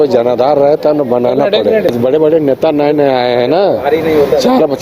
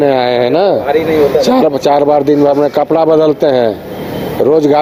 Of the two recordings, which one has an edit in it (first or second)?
first